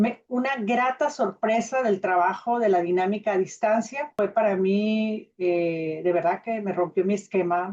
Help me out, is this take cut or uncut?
cut